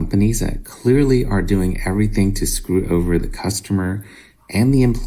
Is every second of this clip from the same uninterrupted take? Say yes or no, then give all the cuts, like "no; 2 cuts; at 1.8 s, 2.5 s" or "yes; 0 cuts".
yes; 0 cuts